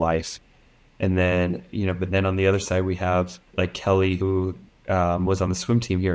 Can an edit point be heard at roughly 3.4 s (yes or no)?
yes